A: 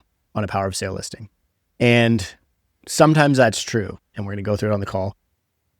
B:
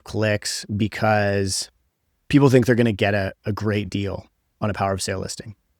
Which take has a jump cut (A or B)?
A